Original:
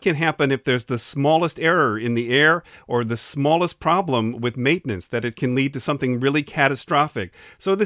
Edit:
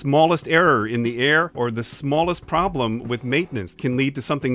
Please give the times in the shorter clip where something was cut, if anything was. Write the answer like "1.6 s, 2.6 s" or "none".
1.5 s, 3.7 s